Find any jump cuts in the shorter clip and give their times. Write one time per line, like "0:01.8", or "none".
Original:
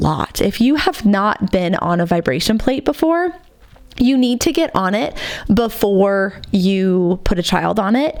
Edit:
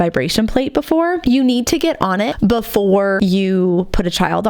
0:01.2
0:02.3
0:03.2